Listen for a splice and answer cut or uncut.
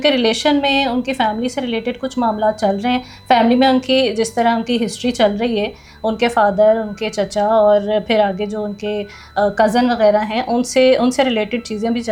uncut